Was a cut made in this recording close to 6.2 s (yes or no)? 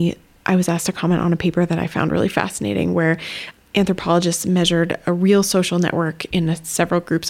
yes